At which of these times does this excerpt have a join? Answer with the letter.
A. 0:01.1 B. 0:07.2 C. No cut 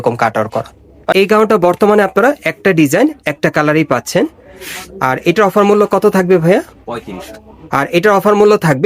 A